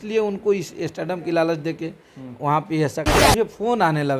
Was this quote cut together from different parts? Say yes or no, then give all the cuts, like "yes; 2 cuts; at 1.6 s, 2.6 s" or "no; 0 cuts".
yes; 1 cut; at 3.1 s